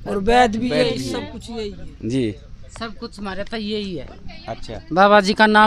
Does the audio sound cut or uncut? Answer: uncut